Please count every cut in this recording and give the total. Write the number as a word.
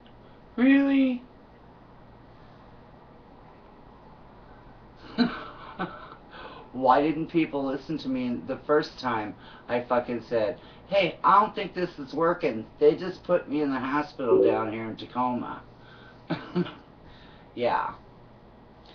zero